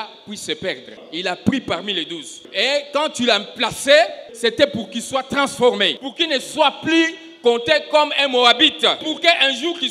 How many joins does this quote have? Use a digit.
5